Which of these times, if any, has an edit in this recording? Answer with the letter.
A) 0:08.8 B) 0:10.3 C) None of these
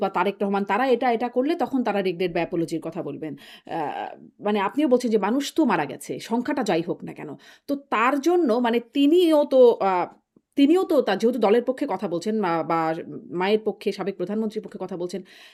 C